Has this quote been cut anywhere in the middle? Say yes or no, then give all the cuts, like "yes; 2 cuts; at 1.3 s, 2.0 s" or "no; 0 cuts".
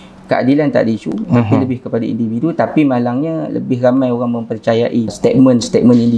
yes; 1 cut; at 5.1 s